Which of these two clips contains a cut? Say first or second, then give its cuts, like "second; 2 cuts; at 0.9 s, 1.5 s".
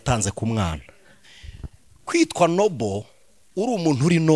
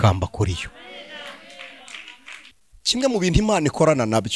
second; 1 cut; at 2.5 s